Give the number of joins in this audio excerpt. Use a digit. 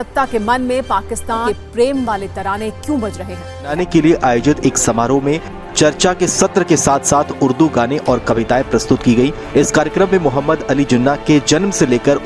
2